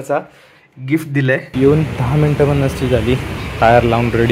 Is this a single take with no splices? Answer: no; 2 cuts; at 1.5 s, 3.4 s

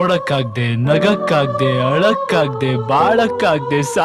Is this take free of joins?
yes; 0 cuts

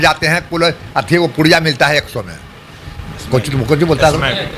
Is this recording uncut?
yes; 0 cuts

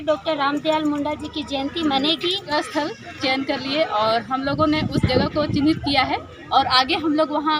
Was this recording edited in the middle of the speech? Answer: yes; 1 cut; at 2.5 s

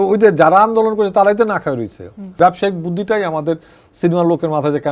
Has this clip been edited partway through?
yes; 1 cut; at 2.4 s

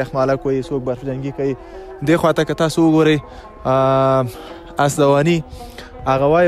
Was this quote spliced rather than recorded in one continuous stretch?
no; 0 cuts

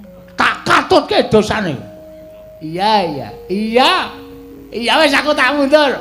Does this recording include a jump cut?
no; 0 cuts

